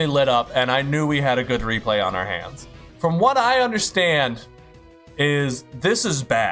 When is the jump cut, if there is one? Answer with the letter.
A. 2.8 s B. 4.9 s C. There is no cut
A